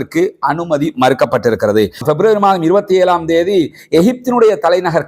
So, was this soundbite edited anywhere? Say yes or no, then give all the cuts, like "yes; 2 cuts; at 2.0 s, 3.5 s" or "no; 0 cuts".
yes; 1 cut; at 2.0 s